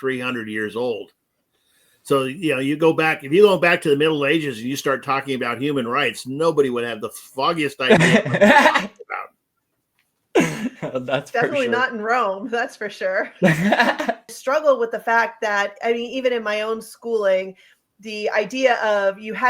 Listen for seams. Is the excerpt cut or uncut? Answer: cut